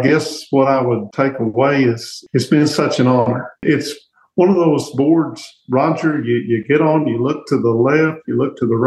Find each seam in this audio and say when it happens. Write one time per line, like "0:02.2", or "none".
0:01.1
0:02.1
0:03.6